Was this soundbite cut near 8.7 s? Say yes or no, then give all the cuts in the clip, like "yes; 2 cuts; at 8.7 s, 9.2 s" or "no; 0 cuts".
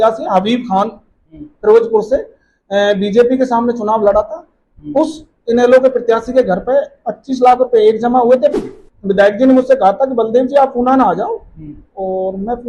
yes; 1 cut; at 8.7 s